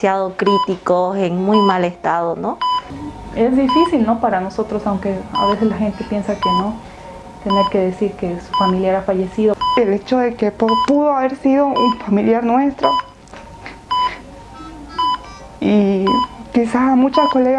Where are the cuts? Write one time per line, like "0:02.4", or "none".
0:03.0
0:09.6